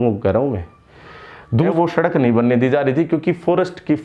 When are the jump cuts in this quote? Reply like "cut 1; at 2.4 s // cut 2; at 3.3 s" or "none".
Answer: cut 1; at 1.7 s